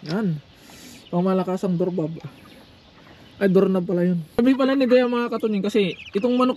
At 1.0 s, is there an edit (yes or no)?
no